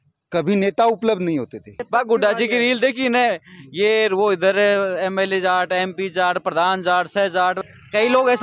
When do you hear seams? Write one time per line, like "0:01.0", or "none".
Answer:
0:01.8
0:07.6